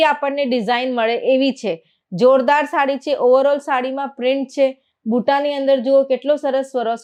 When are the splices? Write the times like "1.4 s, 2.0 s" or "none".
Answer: none